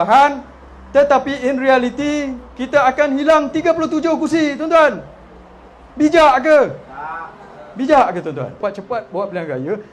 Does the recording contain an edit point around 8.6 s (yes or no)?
yes